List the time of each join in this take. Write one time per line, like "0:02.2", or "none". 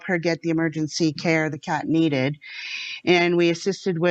none